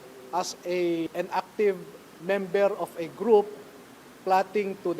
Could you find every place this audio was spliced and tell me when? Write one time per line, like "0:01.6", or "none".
0:01.1